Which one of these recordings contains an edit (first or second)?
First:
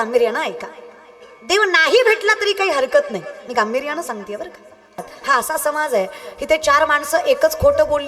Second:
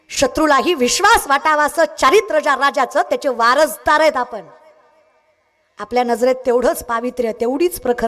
first